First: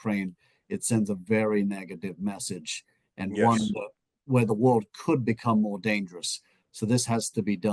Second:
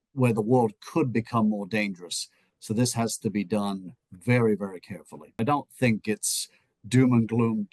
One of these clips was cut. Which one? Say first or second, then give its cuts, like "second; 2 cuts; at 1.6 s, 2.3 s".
second; 1 cut; at 5.4 s